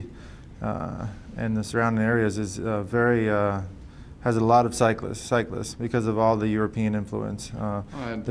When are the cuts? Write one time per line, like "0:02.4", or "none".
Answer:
0:05.9